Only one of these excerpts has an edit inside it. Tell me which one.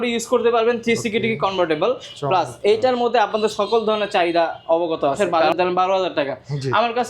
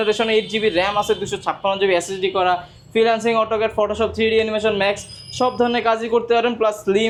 first; 1 cut; at 5.2 s

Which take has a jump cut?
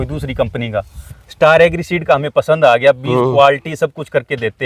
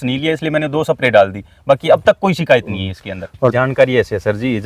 second; 1 cut; at 3.5 s

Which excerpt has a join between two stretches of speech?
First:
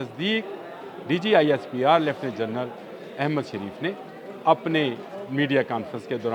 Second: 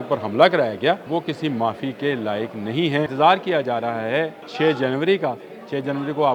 second; 3 cuts; at 1.0 s, 3.1 s, 4.4 s

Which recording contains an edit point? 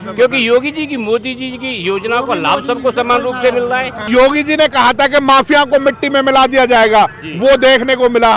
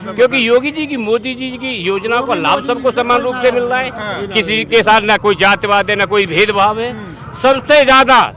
first; 1 cut; at 4.1 s

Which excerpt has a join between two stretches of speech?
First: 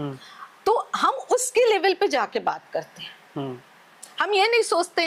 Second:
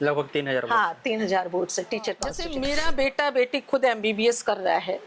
second; 1 cut; at 2.4 s

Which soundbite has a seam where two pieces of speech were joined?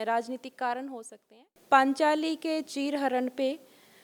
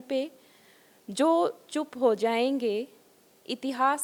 first; 1 cut; at 1.6 s

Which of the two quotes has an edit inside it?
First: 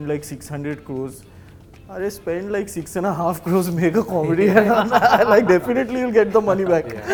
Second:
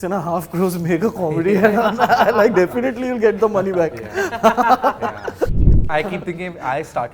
second; 1 cut; at 5.5 s

